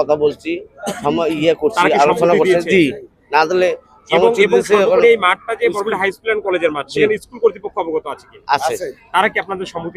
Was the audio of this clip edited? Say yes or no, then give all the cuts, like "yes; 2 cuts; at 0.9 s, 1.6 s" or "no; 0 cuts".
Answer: no; 0 cuts